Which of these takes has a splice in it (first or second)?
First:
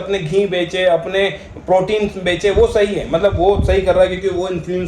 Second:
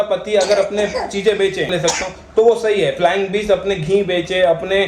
second